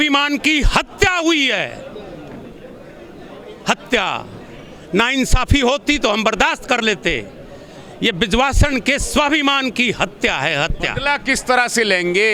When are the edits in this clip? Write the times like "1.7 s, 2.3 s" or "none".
none